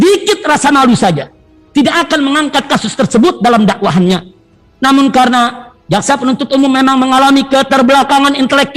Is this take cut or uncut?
uncut